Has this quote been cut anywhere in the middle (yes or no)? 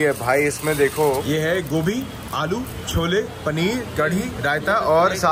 no